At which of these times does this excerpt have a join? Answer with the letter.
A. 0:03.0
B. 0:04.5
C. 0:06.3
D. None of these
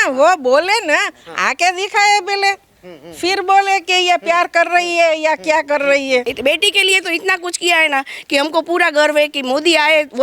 C